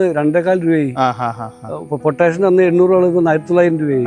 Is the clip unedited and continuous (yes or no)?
yes